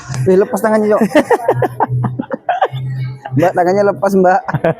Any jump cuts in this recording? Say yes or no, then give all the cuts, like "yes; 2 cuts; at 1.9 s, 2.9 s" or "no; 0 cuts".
no; 0 cuts